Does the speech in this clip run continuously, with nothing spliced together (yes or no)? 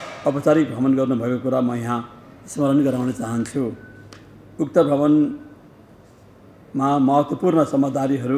yes